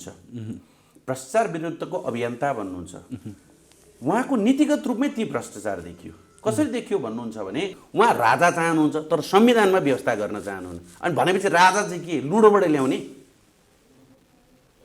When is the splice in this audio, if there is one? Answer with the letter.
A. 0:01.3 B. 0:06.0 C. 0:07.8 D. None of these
C